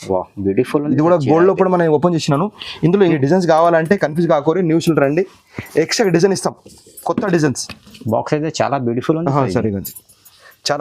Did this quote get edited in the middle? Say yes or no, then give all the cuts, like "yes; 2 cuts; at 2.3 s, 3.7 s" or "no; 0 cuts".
yes; 1 cut; at 3.1 s